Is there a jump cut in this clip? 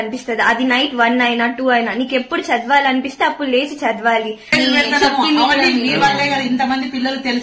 yes; 1 cut; at 4.5 s

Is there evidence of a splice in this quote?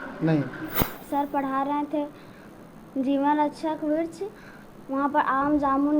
yes; 1 cut; at 1.0 s

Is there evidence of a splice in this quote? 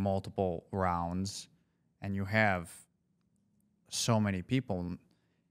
no; 0 cuts

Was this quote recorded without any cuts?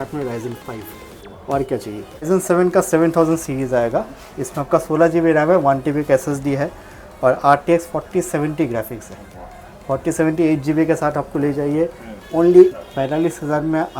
no; 2 cuts; at 2.3 s, 12.8 s

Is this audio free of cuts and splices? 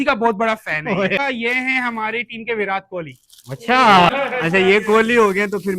no; 2 cuts; at 1.2 s, 4.2 s

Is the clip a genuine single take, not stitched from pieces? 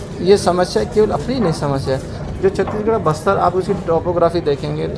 yes; 0 cuts

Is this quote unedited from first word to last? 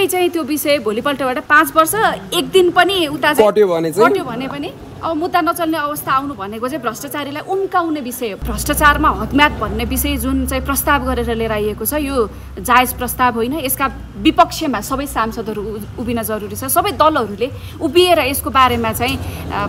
no; 2 cuts; at 1.4 s, 8.4 s

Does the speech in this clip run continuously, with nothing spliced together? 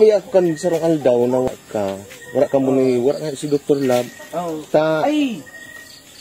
no; 1 cut; at 1.5 s

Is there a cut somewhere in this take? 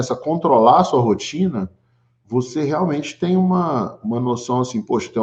no; 0 cuts

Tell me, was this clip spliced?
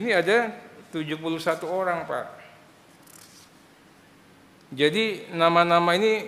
no; 0 cuts

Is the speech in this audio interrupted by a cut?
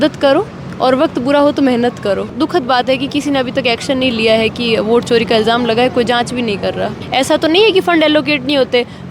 yes; 2 cuts; at 2.3 s, 7.0 s

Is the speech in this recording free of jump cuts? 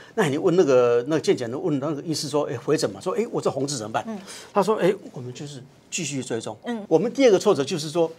no; 1 cut; at 6.7 s

